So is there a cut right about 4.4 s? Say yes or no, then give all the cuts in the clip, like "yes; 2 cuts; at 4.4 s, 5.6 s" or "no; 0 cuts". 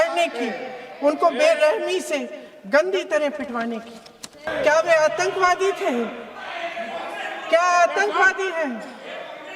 yes; 1 cut; at 4.4 s